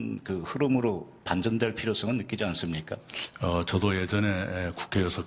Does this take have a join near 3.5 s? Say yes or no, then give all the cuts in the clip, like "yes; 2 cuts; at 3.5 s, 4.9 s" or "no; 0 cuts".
no; 1 cut; at 1.3 s